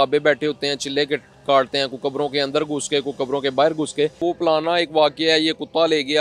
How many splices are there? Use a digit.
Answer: 1